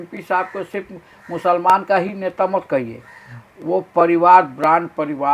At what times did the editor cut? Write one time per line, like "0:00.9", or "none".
none